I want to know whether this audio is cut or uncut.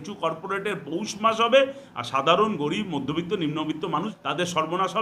cut